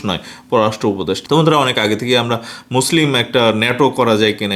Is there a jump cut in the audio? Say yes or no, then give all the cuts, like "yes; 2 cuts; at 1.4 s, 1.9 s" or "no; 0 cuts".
no; 0 cuts